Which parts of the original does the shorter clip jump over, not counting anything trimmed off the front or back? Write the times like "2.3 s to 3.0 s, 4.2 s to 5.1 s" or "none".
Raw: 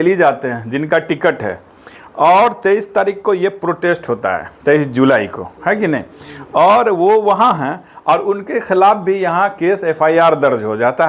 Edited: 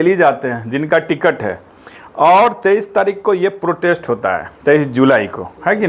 none